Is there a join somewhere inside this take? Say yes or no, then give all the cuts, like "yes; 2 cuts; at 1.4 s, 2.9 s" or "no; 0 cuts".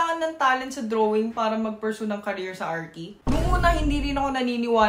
no; 0 cuts